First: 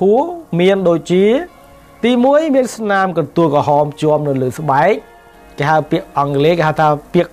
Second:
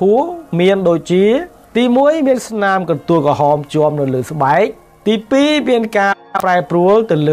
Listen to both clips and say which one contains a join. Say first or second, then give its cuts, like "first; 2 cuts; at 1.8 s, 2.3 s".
second; 2 cuts; at 1.6 s, 4.9 s